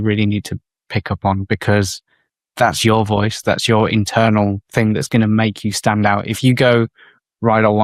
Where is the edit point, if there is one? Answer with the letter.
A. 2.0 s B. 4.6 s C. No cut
C